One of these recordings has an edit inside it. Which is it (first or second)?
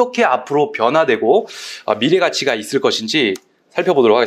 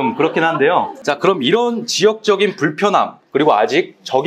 second